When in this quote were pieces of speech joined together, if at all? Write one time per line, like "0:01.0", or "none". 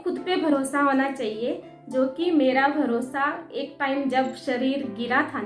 none